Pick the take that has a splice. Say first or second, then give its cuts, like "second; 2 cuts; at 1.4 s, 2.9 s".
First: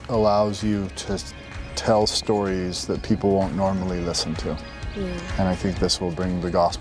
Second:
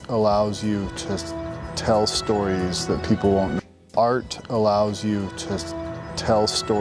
second; 1 cut; at 3.5 s